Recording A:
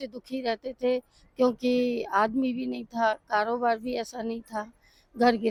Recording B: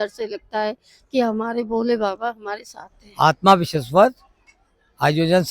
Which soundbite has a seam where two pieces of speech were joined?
B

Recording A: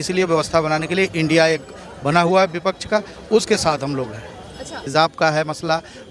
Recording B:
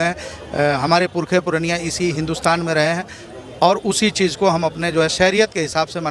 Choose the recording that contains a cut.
A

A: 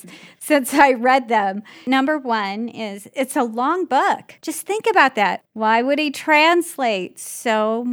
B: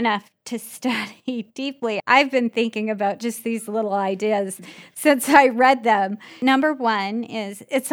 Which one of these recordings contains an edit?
B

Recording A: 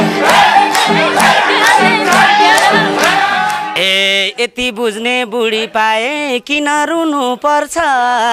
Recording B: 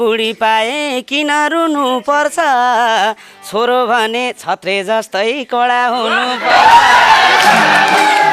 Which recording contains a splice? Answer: A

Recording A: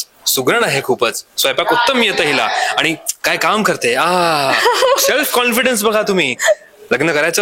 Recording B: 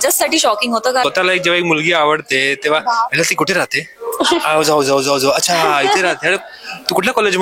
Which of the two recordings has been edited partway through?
B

